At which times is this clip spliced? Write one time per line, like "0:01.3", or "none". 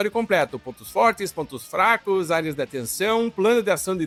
none